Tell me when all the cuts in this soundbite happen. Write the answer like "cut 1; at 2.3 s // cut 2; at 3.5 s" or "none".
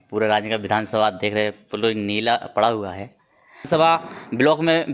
cut 1; at 3.7 s